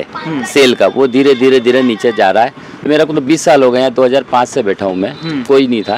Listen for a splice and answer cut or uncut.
cut